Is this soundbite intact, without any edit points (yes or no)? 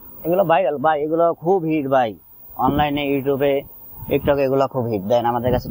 yes